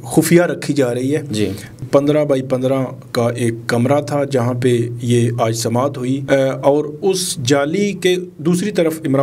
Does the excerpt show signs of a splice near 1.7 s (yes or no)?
yes